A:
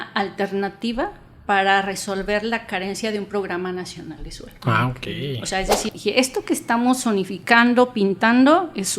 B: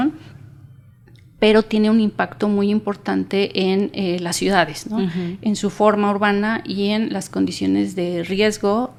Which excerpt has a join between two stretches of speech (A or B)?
A